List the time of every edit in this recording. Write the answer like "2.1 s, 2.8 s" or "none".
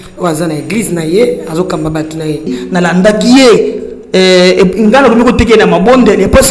2.6 s